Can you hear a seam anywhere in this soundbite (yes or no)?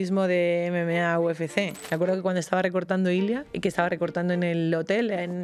yes